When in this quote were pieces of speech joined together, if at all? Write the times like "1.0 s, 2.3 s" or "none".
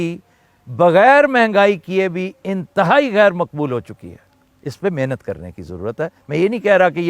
none